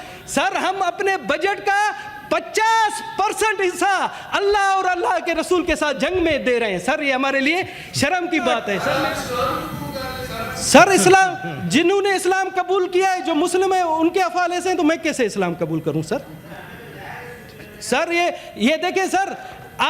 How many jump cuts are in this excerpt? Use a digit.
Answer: 1